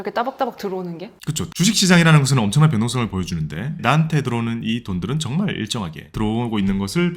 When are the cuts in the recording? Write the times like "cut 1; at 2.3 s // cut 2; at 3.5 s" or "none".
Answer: cut 1; at 1.5 s // cut 2; at 6.1 s